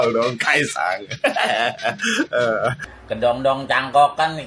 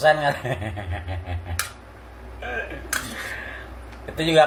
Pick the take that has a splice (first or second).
first